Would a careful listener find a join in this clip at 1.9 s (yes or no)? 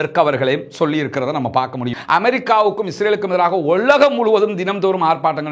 yes